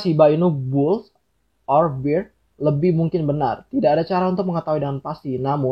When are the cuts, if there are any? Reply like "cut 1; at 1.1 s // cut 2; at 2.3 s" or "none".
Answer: none